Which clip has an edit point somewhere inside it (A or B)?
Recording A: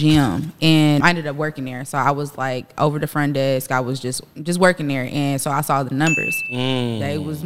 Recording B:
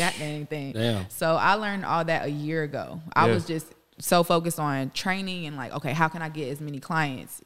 A